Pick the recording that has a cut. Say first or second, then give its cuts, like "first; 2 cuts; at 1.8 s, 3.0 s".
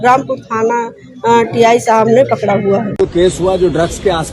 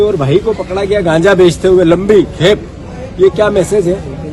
first; 1 cut; at 2.9 s